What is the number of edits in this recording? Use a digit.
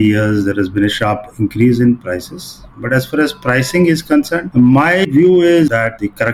0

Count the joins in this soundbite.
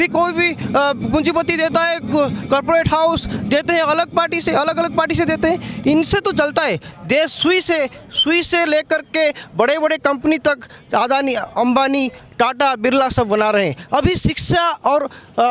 0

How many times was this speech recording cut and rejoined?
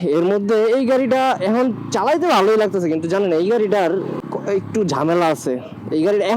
1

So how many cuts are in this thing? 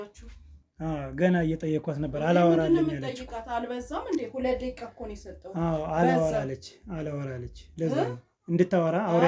0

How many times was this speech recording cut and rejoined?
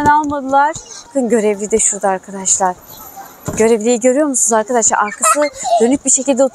1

